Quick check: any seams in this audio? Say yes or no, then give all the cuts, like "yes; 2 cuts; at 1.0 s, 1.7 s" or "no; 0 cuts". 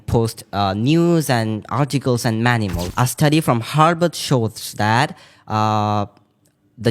yes; 1 cut; at 2.8 s